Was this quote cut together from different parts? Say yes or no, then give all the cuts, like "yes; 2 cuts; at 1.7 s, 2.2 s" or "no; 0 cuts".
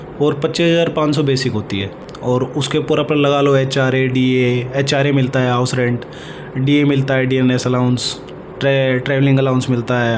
no; 0 cuts